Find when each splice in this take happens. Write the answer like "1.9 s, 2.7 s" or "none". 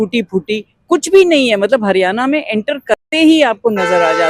none